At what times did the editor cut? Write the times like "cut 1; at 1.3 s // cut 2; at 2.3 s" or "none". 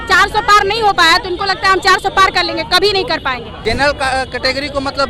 cut 1; at 3.5 s